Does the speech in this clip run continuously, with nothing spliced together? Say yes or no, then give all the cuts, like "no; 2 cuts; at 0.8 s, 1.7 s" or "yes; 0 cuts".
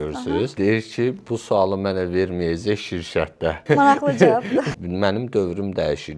no; 3 cuts; at 1.0 s, 3.6 s, 4.7 s